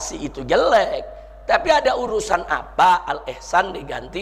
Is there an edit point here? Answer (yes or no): no